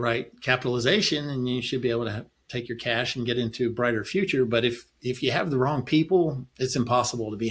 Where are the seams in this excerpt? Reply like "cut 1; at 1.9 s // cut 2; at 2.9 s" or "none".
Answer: none